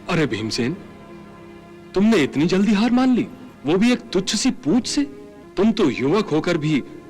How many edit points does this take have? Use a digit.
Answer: 0